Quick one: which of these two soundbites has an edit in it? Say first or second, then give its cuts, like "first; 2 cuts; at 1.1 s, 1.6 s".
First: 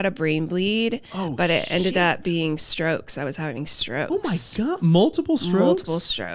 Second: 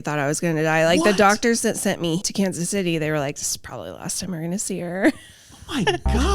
second; 1 cut; at 2.2 s